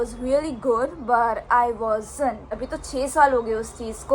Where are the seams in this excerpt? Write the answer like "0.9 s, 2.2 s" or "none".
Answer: 2.6 s